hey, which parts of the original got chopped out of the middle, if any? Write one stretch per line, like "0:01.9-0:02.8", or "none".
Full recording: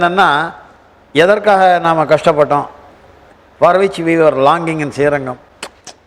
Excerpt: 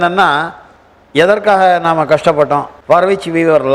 0:02.7-0:03.5